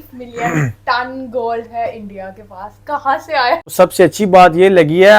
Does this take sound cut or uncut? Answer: cut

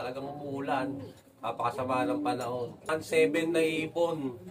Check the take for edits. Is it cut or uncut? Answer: cut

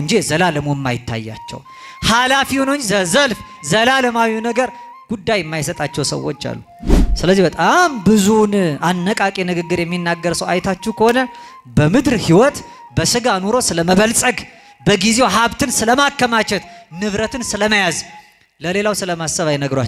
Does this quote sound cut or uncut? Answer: uncut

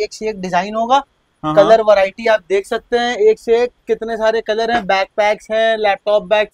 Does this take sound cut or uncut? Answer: uncut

